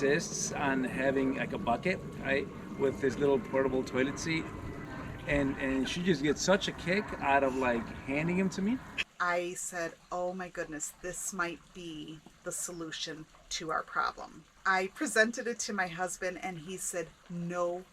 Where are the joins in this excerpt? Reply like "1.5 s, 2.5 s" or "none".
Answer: 4.8 s, 9.0 s, 14.6 s